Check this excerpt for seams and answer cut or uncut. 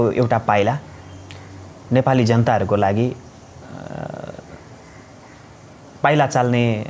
uncut